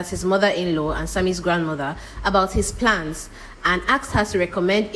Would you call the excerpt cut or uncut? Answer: uncut